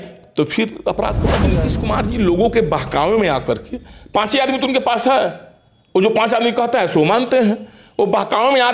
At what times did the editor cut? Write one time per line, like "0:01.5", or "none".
0:01.5